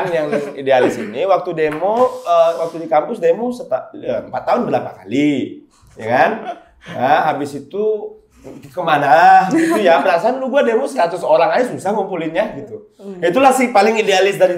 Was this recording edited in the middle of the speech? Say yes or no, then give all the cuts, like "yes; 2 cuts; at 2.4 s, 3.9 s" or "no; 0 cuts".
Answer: no; 0 cuts